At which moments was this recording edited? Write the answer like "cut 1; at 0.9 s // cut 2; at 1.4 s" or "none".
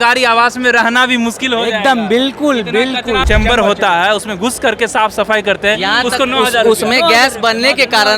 cut 1; at 3.2 s